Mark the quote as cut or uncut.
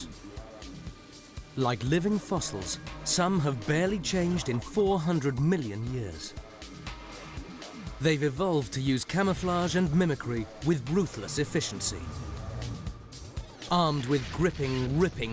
uncut